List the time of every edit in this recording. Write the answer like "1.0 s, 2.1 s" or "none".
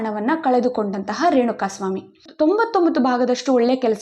2.3 s